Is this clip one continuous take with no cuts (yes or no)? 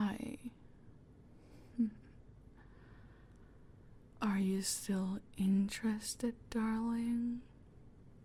yes